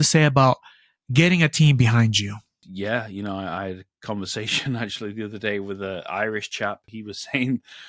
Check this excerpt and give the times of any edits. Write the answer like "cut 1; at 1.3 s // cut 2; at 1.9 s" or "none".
cut 1; at 2.6 s // cut 2; at 6.9 s